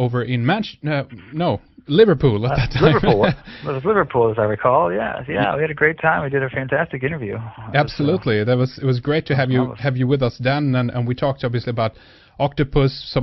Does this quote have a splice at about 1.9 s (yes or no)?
no